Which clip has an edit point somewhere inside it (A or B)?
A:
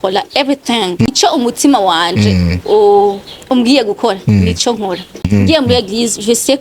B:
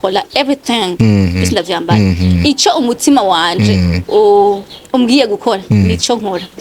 A